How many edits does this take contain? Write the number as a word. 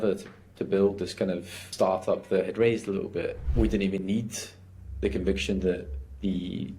two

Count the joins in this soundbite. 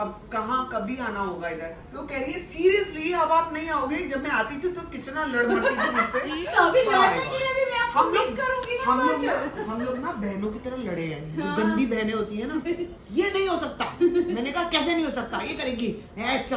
zero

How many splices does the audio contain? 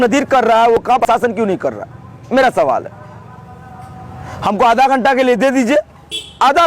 one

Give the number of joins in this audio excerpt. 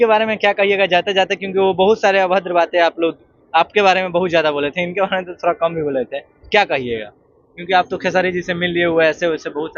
zero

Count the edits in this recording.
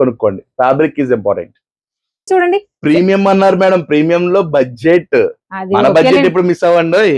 one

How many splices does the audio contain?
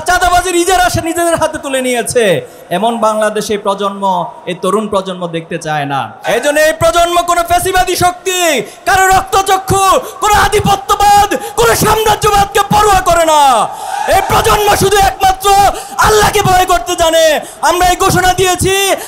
one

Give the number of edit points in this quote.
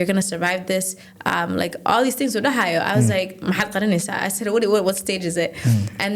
zero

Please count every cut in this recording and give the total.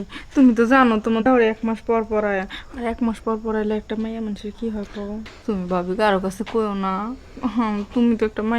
two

